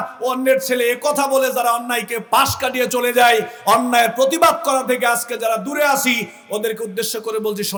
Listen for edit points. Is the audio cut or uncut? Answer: uncut